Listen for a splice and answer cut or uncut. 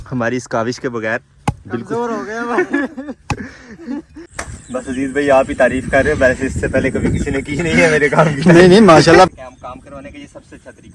cut